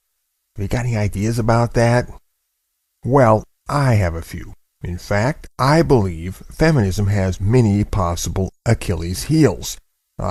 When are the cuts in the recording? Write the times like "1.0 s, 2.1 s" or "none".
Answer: none